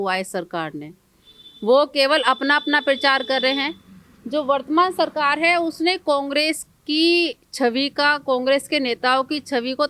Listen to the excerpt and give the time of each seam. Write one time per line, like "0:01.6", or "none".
none